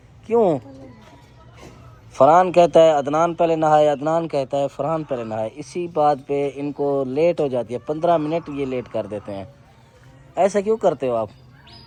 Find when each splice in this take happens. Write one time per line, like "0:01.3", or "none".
none